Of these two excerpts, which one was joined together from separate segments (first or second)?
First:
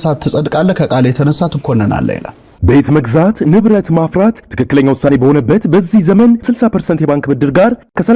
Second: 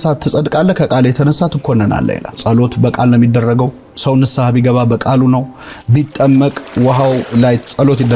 second